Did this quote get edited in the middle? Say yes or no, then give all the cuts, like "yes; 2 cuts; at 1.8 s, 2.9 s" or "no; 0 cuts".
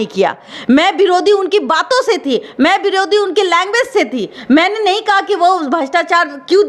no; 0 cuts